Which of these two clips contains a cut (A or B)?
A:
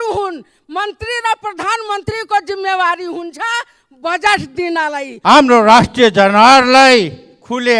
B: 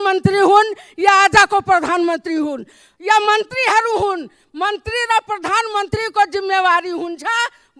A